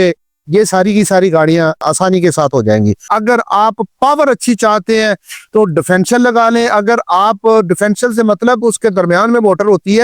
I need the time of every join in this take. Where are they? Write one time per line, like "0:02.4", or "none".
0:03.0